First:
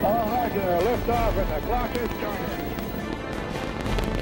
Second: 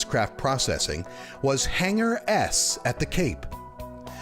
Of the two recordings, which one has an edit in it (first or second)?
second